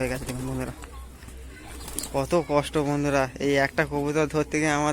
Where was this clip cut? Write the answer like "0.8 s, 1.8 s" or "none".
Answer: 2.0 s